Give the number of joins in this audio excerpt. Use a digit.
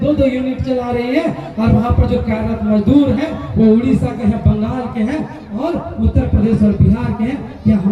0